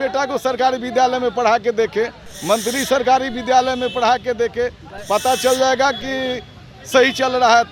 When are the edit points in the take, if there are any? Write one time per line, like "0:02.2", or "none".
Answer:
none